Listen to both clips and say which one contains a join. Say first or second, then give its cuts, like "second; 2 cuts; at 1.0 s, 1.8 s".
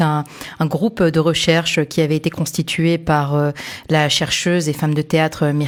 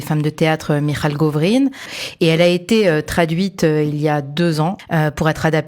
second; 2 cuts; at 2.0 s, 4.8 s